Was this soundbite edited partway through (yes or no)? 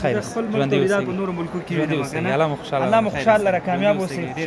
no